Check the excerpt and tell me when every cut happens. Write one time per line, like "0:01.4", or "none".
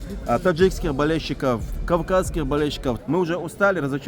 0:03.0